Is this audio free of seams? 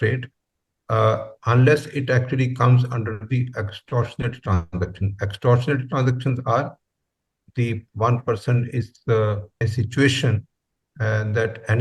no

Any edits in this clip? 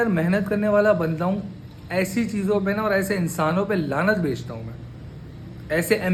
no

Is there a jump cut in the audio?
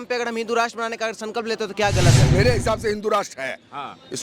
yes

